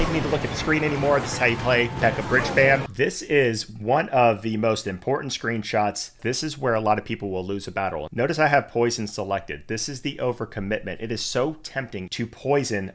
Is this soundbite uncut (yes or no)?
no